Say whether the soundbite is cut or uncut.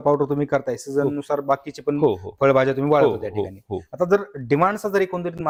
uncut